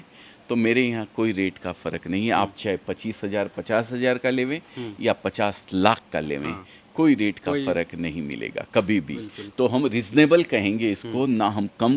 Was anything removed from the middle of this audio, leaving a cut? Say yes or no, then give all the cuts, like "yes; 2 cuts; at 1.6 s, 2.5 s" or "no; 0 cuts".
no; 0 cuts